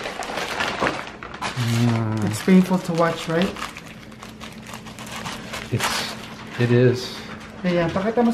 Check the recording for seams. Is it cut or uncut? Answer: uncut